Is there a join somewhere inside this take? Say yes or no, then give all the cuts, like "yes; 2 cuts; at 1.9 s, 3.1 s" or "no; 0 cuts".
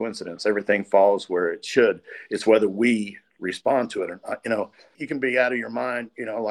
yes; 1 cut; at 5.0 s